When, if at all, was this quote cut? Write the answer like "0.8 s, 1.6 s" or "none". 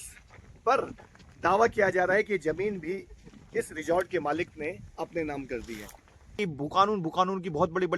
6.4 s